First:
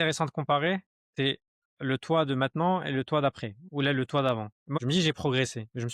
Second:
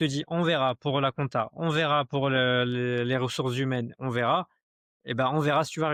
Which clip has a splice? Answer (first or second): first